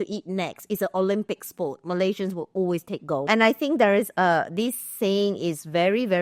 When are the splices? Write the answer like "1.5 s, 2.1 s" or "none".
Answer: 3.2 s